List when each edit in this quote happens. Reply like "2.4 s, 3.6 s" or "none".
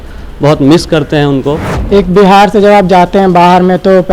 1.7 s

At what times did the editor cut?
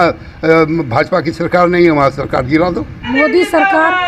3.1 s

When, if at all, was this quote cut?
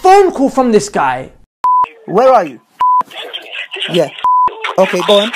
1.5 s

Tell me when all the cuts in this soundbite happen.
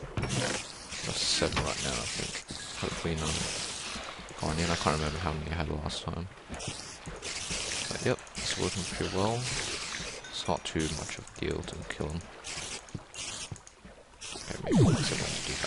1.8 s

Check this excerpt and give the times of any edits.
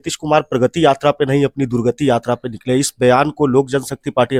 none

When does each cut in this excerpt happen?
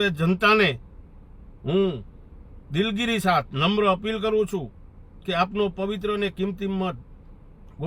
none

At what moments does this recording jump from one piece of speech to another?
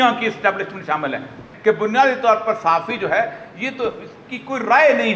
1.5 s

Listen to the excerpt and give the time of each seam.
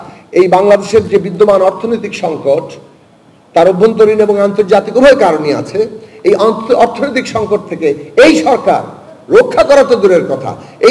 none

